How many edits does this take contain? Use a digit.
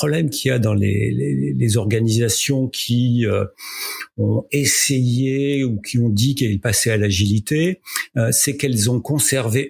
0